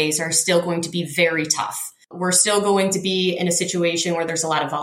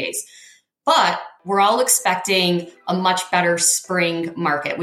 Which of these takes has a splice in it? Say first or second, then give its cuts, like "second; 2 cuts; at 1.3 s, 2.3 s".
first; 1 cut; at 2.1 s